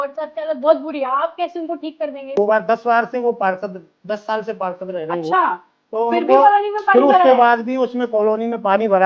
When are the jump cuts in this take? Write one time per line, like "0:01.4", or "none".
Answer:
0:02.3